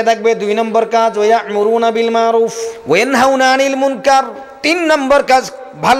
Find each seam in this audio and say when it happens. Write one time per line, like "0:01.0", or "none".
0:02.7
0:04.4